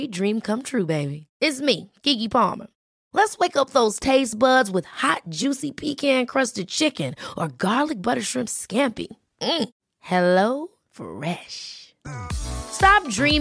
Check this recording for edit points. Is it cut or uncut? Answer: uncut